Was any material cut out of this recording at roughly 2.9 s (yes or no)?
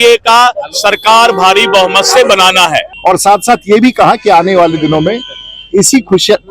yes